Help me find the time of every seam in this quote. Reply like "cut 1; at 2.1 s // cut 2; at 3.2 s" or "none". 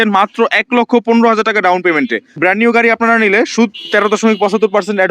cut 1; at 2.2 s